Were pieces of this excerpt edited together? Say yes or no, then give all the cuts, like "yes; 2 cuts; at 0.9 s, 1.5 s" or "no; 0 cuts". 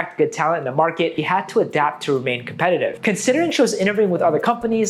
yes; 2 cuts; at 1.2 s, 3.0 s